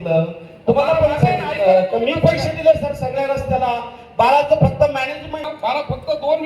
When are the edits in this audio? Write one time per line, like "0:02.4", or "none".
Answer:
0:05.5